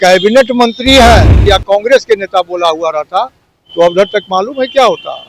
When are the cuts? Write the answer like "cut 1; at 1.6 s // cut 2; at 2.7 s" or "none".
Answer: cut 1; at 1.3 s